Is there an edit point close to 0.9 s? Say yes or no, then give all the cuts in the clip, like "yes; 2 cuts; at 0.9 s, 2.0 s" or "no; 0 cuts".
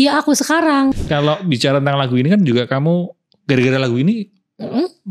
yes; 1 cut; at 0.9 s